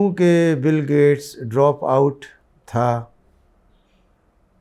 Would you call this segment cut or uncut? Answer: uncut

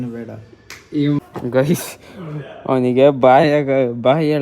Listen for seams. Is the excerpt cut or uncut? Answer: cut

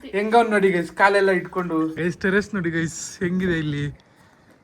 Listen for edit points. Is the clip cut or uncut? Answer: cut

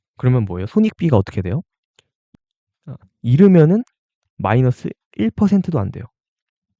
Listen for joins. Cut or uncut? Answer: uncut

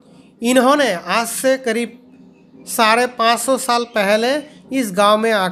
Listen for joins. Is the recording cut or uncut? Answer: uncut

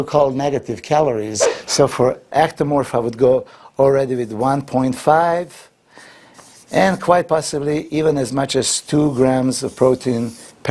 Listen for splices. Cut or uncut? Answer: cut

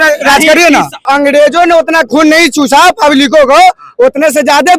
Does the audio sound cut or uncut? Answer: cut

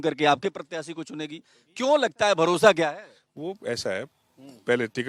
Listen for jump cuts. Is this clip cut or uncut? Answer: uncut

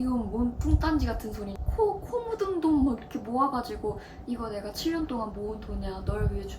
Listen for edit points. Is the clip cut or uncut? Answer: cut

